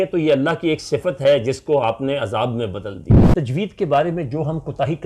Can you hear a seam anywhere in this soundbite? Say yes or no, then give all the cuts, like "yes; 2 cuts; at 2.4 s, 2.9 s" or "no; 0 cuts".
yes; 1 cut; at 3.1 s